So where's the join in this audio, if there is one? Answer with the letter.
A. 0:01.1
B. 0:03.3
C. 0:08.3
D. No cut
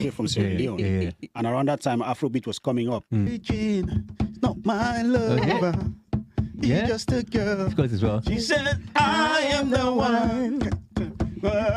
B